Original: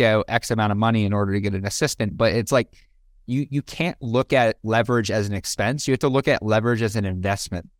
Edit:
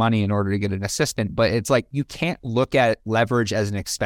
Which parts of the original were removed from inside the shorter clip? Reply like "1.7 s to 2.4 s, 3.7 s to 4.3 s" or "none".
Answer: 2.7 s to 3.5 s